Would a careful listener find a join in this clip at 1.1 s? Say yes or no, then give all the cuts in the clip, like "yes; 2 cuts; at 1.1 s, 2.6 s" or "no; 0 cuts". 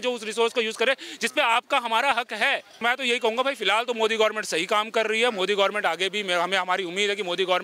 no; 1 cut; at 2.7 s